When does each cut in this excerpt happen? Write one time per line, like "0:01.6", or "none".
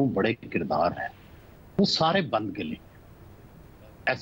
none